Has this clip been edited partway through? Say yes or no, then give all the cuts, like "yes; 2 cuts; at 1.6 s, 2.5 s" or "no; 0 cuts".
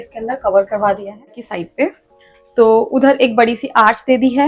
yes; 1 cut; at 1.5 s